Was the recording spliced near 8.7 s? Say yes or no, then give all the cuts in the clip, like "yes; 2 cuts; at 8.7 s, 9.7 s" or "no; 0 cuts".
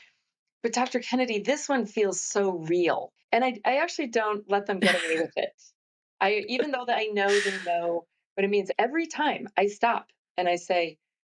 yes; 2 cuts; at 3.1 s, 8.7 s